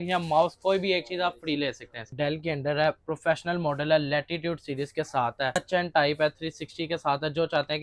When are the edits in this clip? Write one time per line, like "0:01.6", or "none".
0:02.1
0:05.6